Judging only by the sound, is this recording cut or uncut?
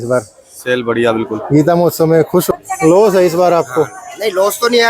cut